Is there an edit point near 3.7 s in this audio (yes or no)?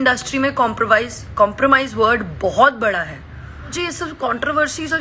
yes